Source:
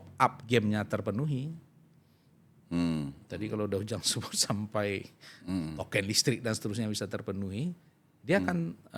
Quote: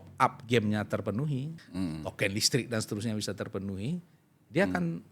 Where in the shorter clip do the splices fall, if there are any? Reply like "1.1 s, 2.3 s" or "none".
1.6 s